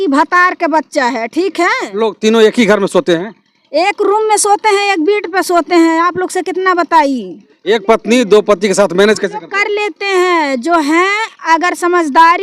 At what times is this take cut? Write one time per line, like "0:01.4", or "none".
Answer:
0:02.0
0:07.5